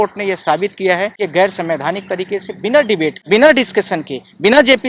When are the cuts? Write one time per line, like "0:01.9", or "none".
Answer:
0:01.1
0:03.2

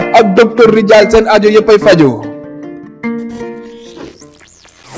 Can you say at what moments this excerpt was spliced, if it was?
0:03.9

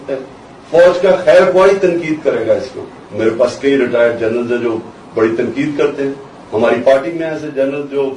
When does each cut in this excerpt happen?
none

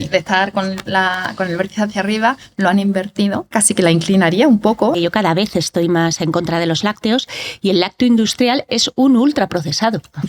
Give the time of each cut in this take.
0:03.5
0:05.0

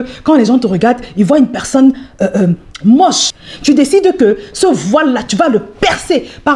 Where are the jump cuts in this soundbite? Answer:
0:03.3

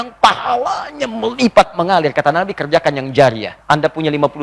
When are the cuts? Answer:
0:03.5

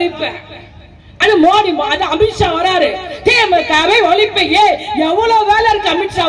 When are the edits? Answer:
none

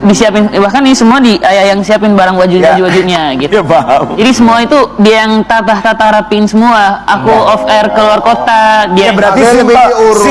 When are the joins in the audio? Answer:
none

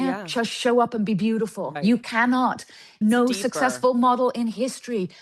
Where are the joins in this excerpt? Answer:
0:01.7
0:03.0

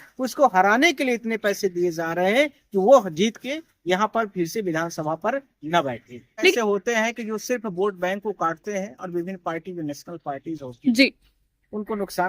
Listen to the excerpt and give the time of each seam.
0:06.5

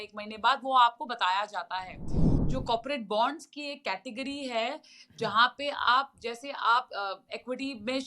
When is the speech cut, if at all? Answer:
0:02.4

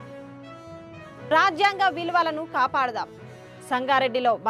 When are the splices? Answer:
none

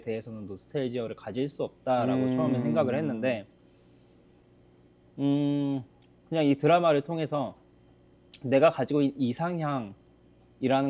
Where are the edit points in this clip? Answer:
none

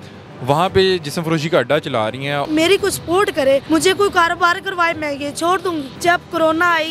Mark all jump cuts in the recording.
0:02.4
0:03.6
0:05.9

